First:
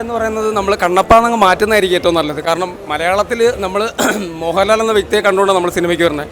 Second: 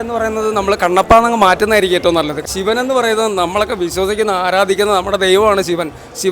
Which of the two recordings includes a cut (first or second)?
second